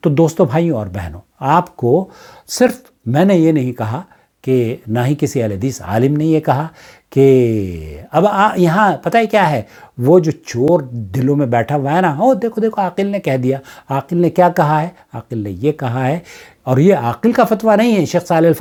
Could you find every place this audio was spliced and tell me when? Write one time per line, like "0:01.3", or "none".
none